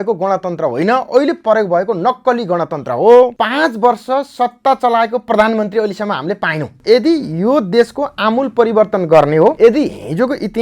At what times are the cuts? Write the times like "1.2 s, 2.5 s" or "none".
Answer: 3.4 s, 6.8 s, 9.6 s

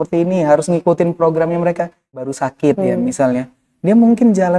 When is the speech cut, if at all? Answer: 2.3 s

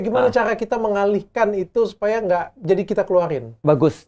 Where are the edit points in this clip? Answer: none

